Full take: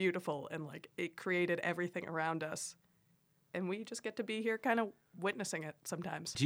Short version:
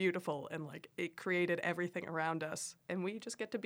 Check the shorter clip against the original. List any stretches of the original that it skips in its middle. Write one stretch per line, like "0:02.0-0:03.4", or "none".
0:02.7-0:03.3